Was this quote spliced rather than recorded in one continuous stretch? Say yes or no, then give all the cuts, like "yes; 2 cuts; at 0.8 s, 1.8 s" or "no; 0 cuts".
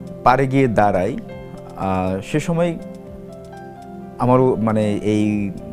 no; 0 cuts